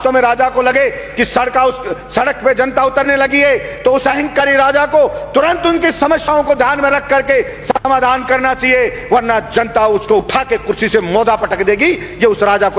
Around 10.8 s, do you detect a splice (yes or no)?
no